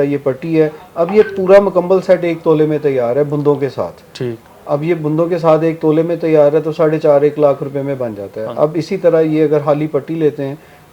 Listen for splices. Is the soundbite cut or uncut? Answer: uncut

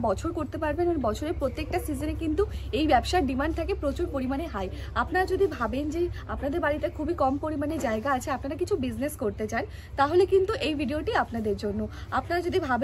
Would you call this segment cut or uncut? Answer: uncut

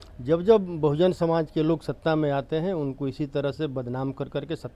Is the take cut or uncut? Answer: uncut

